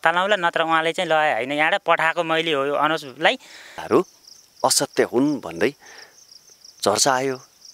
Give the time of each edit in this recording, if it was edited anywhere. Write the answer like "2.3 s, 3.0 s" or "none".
3.8 s

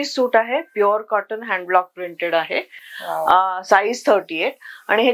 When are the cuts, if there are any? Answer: none

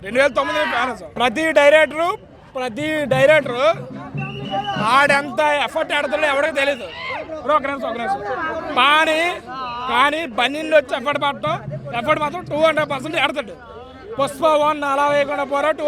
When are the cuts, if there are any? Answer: 1.1 s

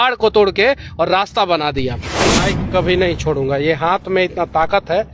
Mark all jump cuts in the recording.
2.2 s

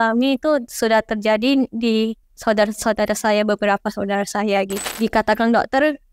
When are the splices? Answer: 2.3 s, 4.9 s

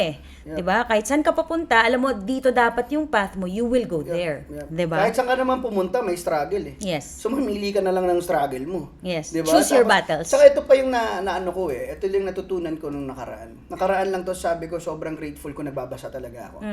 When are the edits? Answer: none

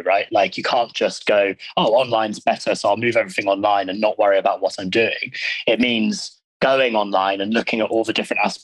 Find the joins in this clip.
none

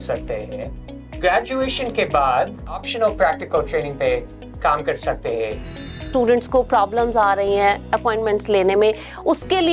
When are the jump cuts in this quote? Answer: 1.0 s, 2.8 s, 6.1 s

